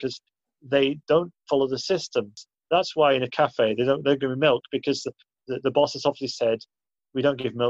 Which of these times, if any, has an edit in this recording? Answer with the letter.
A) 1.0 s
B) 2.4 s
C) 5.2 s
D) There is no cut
B